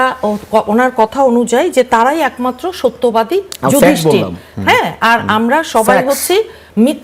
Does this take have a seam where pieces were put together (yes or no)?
no